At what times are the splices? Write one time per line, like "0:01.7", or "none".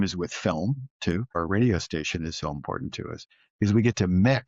0:01.4